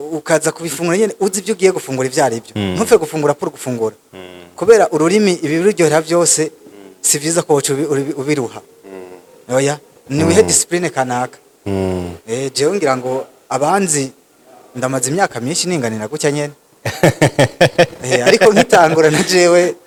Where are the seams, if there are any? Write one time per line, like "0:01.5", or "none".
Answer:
none